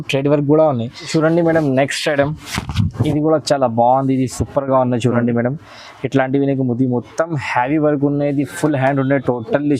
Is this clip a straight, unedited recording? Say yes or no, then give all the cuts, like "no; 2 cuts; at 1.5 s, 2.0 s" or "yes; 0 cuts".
no; 1 cut; at 0.9 s